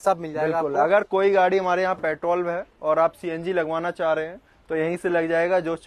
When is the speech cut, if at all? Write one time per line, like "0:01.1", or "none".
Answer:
none